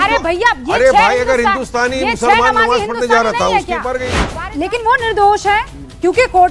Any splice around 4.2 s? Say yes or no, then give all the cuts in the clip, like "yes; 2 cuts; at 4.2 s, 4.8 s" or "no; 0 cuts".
yes; 1 cut; at 4.2 s